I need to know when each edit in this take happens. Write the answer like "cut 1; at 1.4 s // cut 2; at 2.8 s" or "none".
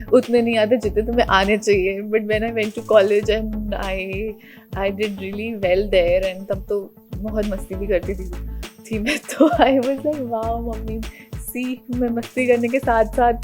none